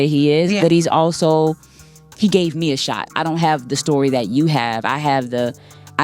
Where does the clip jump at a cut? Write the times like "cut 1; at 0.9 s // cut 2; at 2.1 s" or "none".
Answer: none

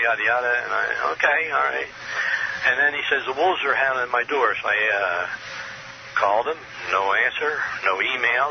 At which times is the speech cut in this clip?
cut 1; at 5.9 s

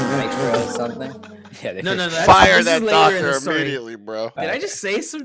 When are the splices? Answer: cut 1; at 4.3 s

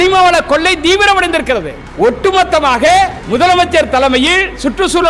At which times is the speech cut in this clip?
cut 1; at 1.8 s // cut 2; at 3.2 s

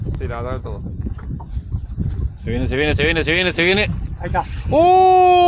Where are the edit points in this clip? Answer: none

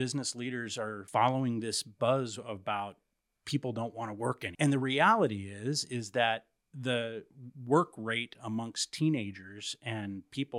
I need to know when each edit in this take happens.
cut 1; at 1.0 s // cut 2; at 4.5 s

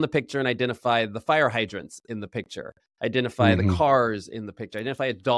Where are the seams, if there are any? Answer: none

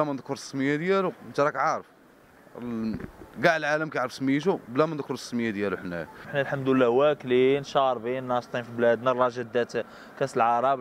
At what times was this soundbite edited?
cut 1; at 6.3 s

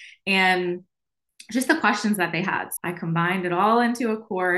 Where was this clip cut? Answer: cut 1; at 2.7 s

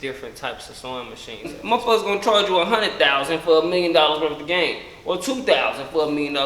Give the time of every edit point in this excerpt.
cut 1; at 1.5 s

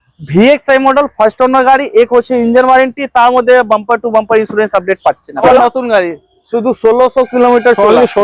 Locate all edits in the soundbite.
cut 1; at 5.4 s

